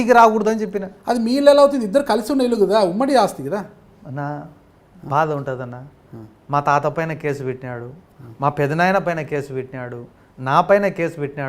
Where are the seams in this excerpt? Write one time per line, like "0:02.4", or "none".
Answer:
none